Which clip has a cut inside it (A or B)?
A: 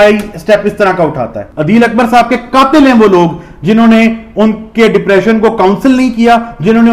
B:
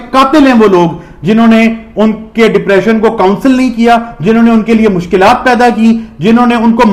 A